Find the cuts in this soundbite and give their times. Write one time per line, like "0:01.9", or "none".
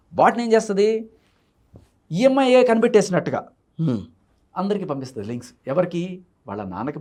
none